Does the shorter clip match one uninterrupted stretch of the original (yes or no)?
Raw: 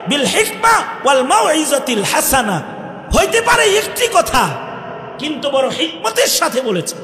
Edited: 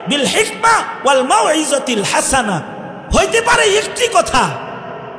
yes